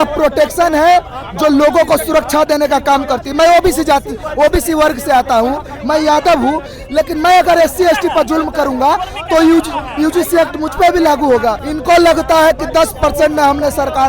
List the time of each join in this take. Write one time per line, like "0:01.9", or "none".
0:11.7

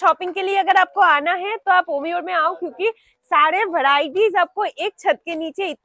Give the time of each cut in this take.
none

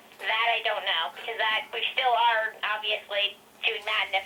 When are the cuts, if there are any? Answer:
none

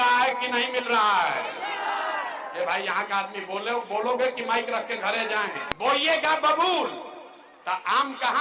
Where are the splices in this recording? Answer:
0:05.6

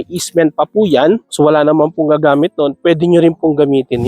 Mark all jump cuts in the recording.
0:01.3

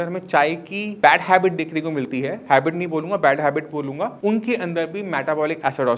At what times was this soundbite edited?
none

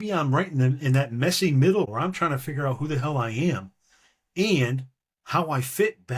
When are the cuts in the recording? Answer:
0:01.9

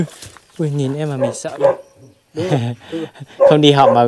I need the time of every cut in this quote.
0:01.3

